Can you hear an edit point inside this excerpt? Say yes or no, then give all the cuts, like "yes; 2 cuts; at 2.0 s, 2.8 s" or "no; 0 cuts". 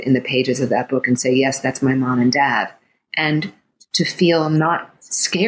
no; 0 cuts